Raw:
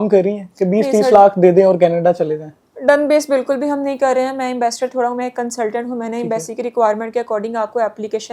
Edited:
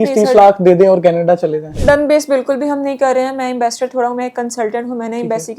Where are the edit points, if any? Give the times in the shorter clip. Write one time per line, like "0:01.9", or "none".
0:01.7

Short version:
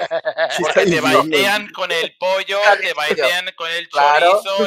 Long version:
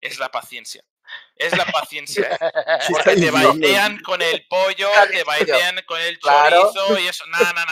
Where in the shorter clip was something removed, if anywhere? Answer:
none

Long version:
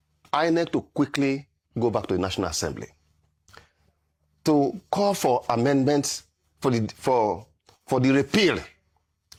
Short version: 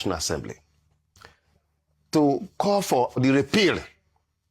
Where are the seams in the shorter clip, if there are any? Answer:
0:03.2

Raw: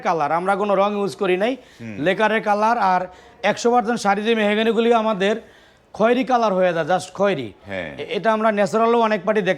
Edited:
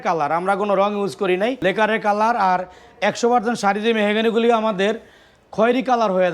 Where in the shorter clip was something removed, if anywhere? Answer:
0:01.6

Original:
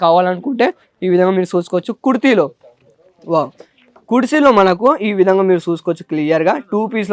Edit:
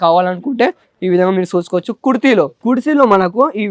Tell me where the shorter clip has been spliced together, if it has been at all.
0:02.5

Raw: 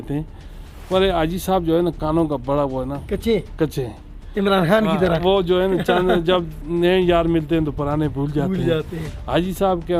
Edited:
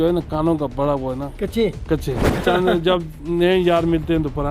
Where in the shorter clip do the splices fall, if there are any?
0:02.4

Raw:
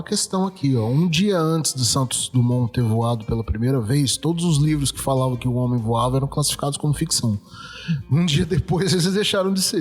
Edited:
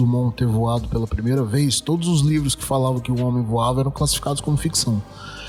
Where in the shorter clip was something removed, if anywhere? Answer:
none

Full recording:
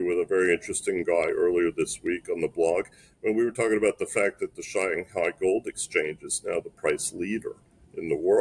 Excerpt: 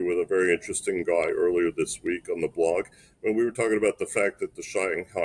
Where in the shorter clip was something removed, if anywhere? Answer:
none

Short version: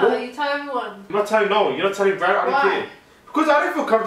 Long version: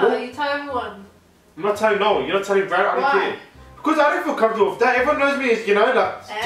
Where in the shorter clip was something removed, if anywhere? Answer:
0:01.0

